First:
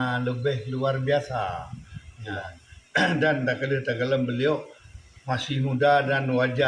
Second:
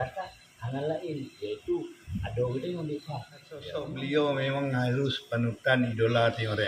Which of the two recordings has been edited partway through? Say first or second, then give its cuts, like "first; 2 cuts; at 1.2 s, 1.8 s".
second; 1 cut; at 3.8 s